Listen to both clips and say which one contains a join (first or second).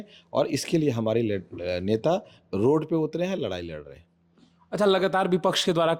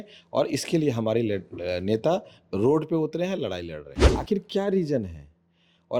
second